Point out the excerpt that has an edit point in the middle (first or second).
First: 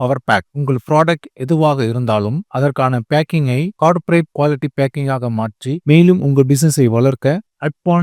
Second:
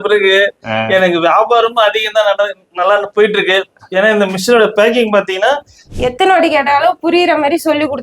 second